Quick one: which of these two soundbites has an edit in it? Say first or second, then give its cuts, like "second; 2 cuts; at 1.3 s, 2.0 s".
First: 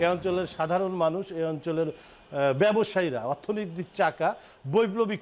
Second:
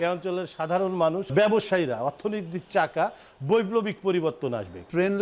second; 1 cut; at 1.3 s